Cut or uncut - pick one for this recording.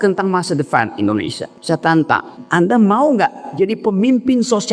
cut